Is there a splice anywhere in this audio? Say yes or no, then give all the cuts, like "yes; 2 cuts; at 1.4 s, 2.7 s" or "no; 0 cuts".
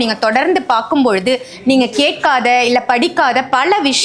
no; 0 cuts